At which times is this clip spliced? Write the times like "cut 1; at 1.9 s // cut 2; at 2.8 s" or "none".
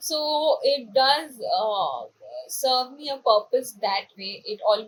none